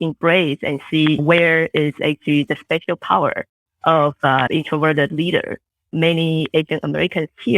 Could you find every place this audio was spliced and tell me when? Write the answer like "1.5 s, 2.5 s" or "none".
1.2 s, 4.5 s, 5.9 s